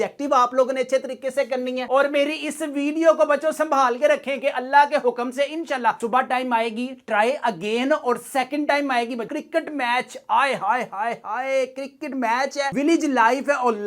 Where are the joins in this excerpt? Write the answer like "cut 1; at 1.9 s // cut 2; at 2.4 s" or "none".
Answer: cut 1; at 1.8 s // cut 2; at 9.3 s